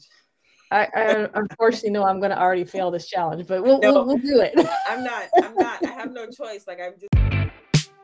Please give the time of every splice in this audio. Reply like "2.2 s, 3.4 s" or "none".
7.0 s